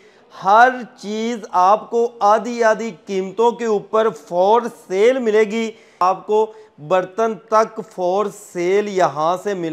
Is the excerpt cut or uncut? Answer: cut